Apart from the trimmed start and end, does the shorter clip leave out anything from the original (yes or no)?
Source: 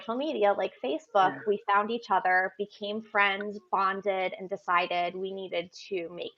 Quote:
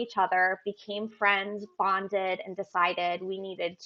no